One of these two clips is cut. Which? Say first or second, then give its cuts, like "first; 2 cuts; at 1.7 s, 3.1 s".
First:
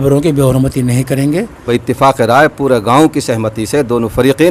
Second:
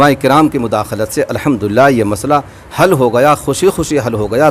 first; 1 cut; at 1.7 s